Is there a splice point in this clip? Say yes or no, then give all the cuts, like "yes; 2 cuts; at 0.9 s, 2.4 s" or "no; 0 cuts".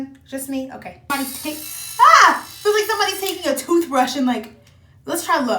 yes; 1 cut; at 1.1 s